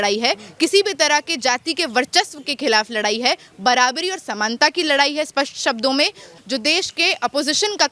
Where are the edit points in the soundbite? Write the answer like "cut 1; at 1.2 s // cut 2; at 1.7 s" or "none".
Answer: cut 1; at 6.3 s